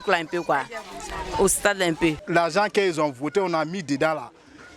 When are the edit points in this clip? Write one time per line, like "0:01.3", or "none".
0:02.2